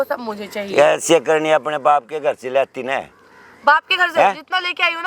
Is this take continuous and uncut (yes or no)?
yes